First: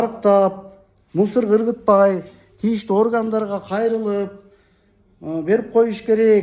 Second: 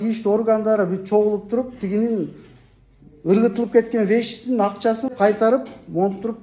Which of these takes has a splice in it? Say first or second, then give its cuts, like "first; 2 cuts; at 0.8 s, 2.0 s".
second; 1 cut; at 5.1 s